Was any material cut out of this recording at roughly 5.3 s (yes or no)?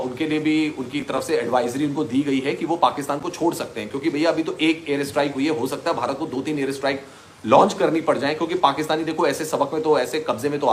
no